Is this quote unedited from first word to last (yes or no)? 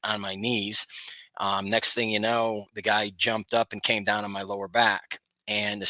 yes